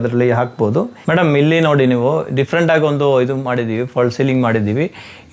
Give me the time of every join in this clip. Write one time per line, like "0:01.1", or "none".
0:01.0